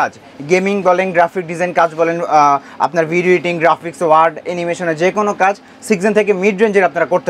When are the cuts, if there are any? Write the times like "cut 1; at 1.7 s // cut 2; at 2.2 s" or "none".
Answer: none